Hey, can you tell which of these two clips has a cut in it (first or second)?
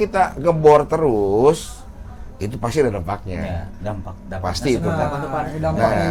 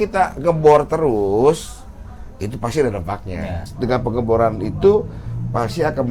second